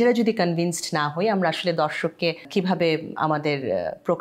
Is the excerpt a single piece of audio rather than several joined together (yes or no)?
no